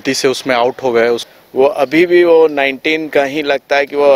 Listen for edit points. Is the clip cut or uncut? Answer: cut